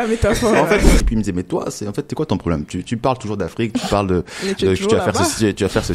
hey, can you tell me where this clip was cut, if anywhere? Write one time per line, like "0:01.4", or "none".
0:01.0